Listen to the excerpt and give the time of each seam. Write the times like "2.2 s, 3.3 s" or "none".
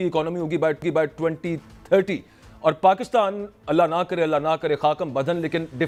none